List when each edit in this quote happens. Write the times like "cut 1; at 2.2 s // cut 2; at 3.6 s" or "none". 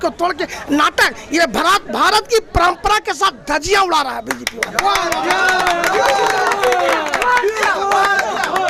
none